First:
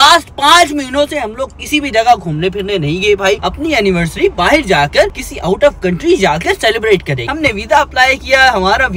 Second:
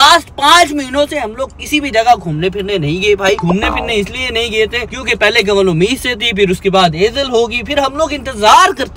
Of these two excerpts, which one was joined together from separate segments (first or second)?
first